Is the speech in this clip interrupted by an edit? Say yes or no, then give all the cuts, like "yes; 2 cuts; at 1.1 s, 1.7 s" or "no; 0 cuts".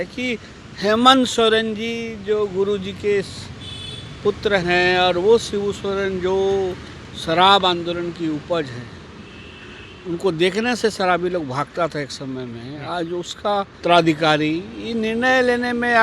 yes; 1 cut; at 13.7 s